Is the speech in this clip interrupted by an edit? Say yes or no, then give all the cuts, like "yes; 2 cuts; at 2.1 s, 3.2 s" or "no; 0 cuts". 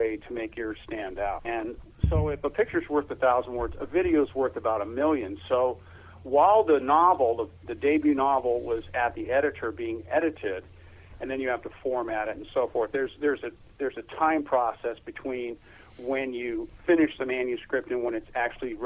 yes; 1 cut; at 1.6 s